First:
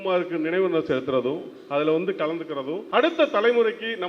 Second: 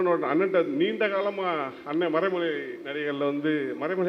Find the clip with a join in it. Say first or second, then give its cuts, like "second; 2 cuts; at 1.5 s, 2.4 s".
first; 1 cut; at 2.8 s